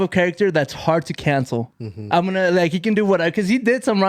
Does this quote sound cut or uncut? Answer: uncut